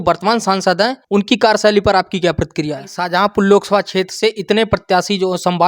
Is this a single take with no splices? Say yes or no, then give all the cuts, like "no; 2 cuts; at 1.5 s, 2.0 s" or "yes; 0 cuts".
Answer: no; 2 cuts; at 1.0 s, 2.9 s